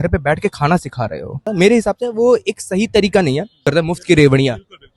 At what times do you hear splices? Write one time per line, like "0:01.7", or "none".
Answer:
0:01.5
0:03.6